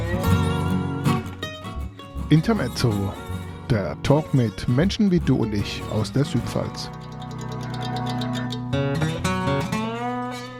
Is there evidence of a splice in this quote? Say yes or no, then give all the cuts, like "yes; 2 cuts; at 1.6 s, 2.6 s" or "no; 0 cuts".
no; 0 cuts